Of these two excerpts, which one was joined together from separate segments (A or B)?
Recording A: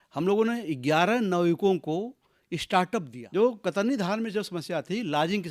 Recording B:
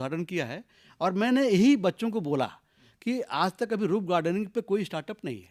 A